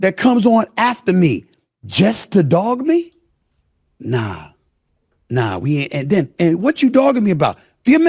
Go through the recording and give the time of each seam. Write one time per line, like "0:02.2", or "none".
none